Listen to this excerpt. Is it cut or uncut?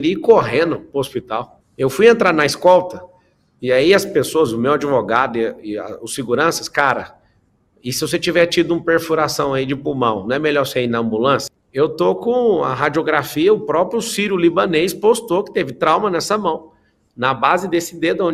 cut